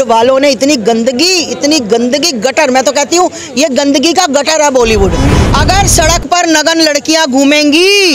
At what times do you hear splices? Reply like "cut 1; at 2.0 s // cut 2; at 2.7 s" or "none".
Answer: cut 1; at 5.4 s